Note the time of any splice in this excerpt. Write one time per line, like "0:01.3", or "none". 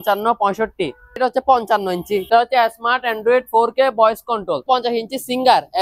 0:01.2
0:02.2
0:04.6